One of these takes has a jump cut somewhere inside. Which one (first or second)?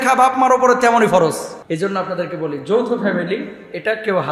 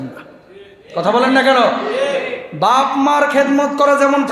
first